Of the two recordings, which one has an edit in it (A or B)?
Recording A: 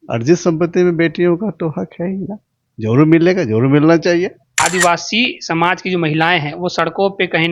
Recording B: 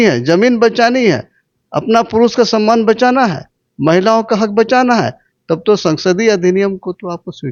A